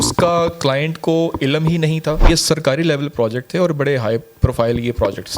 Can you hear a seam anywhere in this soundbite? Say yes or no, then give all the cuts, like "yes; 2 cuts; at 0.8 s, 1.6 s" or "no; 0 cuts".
yes; 1 cut; at 2.2 s